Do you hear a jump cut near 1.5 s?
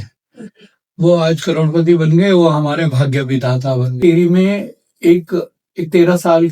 no; 1 cut; at 4.0 s

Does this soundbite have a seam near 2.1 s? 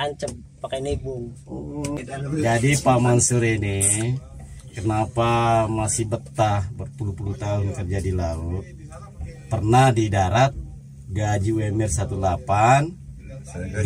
yes; 1 cut; at 2.1 s

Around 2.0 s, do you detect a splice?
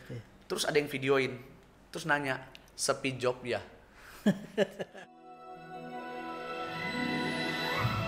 no; 1 cut; at 4.8 s

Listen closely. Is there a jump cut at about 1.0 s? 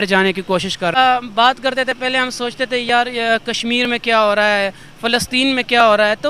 yes; 1 cut; at 1.0 s

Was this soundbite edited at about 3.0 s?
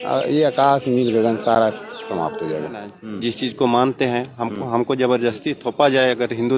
yes; 1 cut; at 3.0 s

